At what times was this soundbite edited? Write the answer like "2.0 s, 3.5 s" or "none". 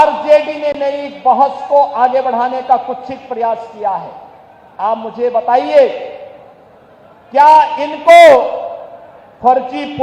none